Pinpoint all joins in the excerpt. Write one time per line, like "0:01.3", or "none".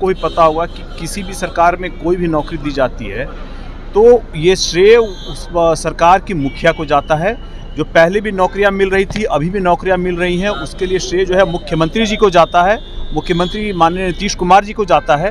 none